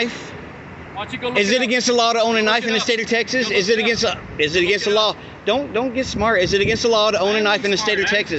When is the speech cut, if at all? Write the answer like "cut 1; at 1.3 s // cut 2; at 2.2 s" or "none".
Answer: none

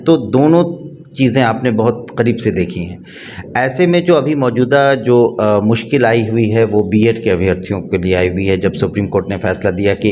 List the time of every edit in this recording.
none

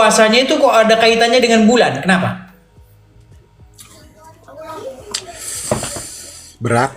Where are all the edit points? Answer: none

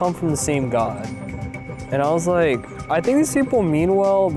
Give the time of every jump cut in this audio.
cut 1; at 2.7 s

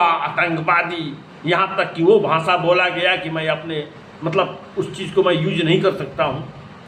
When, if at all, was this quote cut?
none

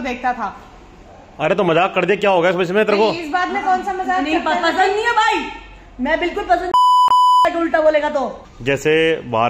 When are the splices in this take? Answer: cut 1; at 6.7 s // cut 2; at 7.5 s // cut 3; at 8.5 s

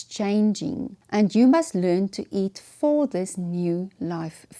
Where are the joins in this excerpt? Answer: cut 1; at 0.9 s

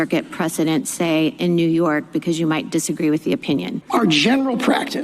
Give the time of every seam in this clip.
cut 1; at 3.8 s

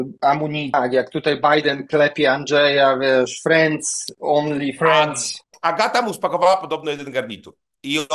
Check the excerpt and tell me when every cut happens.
cut 1; at 0.7 s // cut 2; at 5.5 s

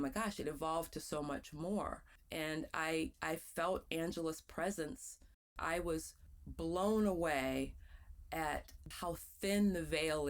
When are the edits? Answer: cut 1; at 5.6 s

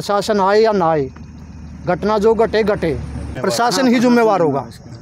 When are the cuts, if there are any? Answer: cut 1; at 3.2 s

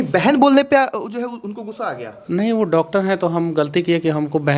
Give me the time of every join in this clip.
none

